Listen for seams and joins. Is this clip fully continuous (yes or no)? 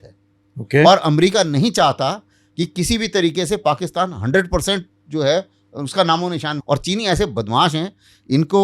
no